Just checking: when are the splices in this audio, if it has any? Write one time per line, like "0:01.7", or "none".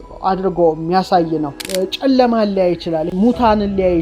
0:01.6
0:03.1